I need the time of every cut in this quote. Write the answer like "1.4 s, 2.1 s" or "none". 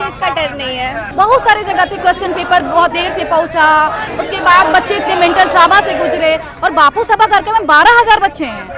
1.0 s, 4.0 s